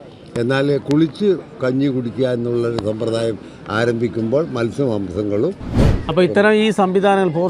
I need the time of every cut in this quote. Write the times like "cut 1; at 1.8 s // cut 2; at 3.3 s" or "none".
cut 1; at 5.8 s